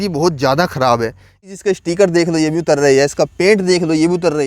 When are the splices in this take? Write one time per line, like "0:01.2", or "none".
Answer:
0:01.5